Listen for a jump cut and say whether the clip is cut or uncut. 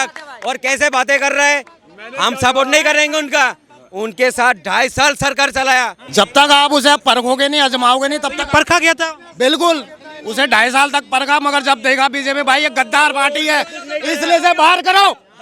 cut